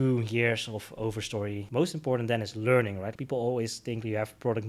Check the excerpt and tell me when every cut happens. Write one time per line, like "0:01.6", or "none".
0:01.6
0:03.1